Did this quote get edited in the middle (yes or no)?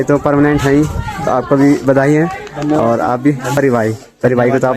yes